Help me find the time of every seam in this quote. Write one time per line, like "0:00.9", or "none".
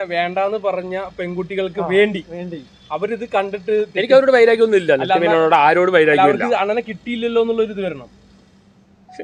none